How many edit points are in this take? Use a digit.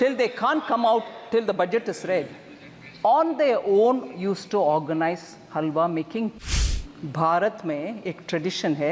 1